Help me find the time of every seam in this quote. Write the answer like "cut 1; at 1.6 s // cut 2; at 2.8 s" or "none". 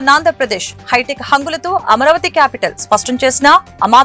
none